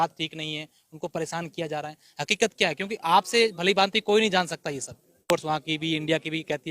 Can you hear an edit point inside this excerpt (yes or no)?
yes